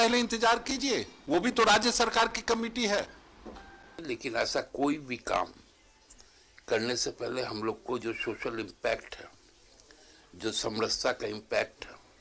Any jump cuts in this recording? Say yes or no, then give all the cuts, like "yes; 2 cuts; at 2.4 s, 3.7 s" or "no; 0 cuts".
no; 0 cuts